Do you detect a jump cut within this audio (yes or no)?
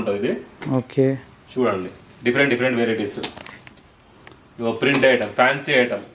no